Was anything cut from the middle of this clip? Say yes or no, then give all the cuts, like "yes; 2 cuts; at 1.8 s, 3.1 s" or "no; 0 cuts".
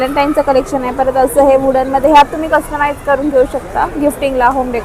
no; 0 cuts